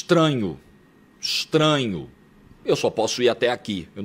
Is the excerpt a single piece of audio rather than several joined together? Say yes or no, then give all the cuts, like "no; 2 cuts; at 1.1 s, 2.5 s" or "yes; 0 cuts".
yes; 0 cuts